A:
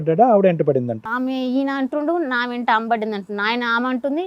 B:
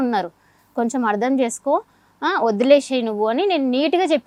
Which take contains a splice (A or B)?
A